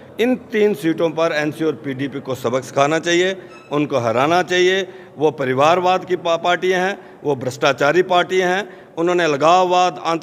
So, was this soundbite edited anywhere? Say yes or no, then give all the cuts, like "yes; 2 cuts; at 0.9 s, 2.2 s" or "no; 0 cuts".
no; 0 cuts